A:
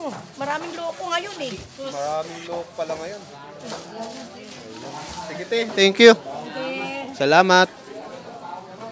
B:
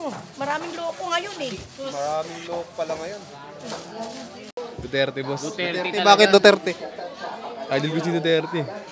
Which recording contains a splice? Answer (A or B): B